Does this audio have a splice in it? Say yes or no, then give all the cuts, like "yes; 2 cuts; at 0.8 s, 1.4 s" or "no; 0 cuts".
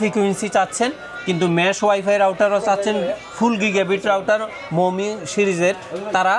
no; 0 cuts